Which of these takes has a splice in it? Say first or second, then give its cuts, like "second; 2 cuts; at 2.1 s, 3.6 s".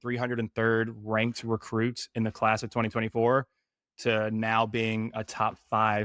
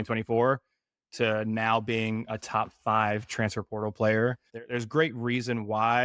second; 1 cut; at 4.5 s